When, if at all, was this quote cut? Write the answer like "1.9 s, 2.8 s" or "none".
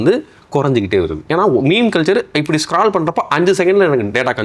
1.3 s